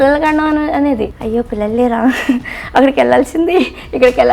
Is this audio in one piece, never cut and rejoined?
no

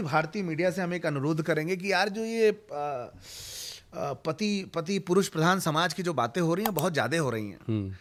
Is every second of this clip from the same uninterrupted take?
yes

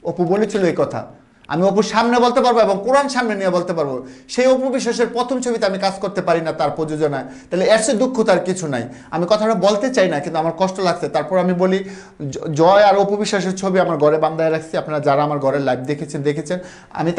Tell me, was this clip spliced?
no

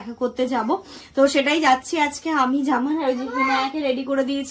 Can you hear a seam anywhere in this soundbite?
no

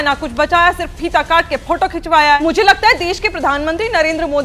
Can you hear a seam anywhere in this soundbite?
yes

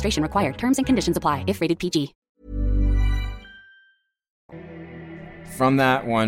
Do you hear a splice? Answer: no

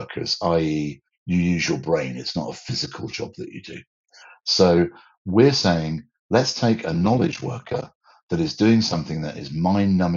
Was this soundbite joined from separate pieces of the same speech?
no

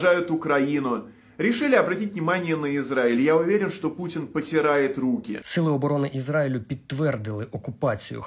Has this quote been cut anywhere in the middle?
yes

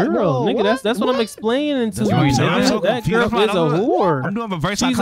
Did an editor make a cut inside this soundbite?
no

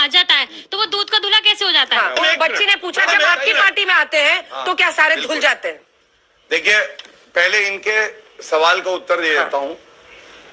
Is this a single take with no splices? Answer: yes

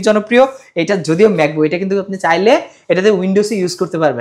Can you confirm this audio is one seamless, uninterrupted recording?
yes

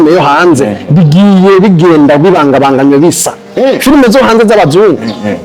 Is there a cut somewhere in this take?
no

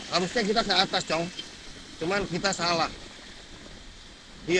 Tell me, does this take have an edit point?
no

